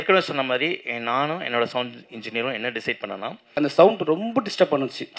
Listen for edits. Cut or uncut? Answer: cut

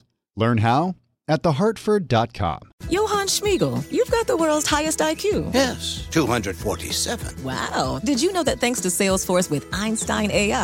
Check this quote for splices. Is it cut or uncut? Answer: cut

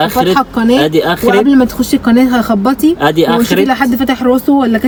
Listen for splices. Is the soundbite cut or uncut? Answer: uncut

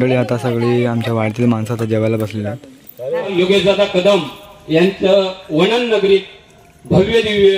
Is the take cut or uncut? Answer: cut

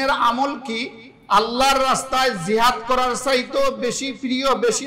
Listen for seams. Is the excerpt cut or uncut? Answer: uncut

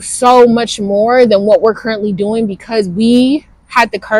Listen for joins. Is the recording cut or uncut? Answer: uncut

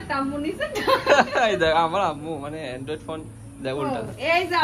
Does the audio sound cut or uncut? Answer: uncut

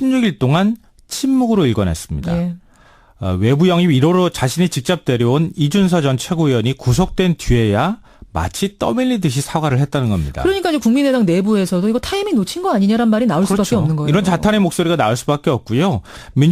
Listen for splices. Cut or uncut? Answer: cut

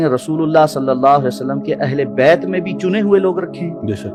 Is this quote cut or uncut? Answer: uncut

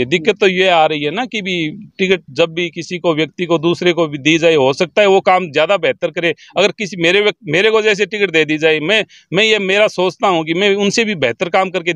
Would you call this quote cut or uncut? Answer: uncut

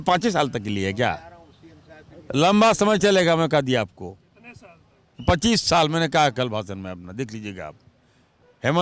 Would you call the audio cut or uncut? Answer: uncut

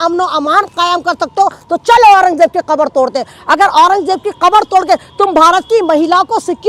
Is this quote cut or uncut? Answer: uncut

